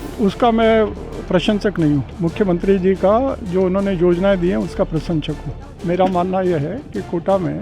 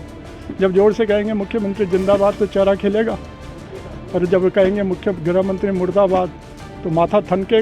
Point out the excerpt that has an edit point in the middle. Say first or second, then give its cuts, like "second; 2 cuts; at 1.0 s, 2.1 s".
first; 1 cut; at 5.7 s